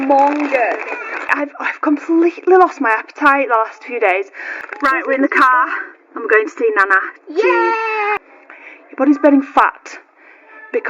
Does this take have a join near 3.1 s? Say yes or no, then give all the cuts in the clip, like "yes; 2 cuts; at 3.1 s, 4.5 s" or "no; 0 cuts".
no; 3 cuts; at 1.3 s, 4.6 s, 8.2 s